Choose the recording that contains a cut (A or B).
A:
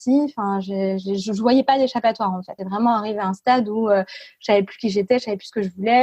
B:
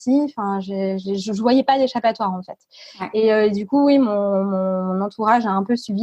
A